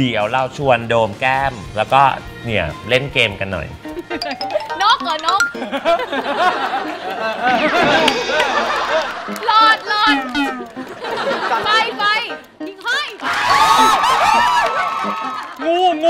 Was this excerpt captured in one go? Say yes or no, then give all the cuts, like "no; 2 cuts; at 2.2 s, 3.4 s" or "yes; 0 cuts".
no; 1 cut; at 3.9 s